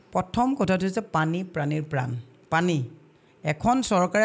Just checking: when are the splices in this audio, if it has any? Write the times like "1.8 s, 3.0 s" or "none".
none